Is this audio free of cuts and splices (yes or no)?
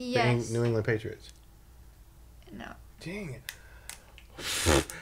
yes